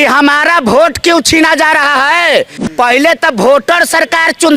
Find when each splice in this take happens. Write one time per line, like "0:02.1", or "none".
0:02.6